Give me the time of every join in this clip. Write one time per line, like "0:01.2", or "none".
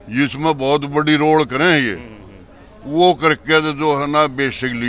none